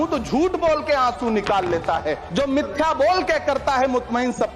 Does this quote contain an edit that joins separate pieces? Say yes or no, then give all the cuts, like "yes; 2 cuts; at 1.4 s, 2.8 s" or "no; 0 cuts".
yes; 1 cut; at 2.2 s